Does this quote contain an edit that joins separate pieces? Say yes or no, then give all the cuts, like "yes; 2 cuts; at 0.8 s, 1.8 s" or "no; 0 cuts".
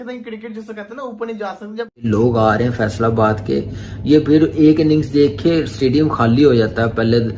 yes; 1 cut; at 2.1 s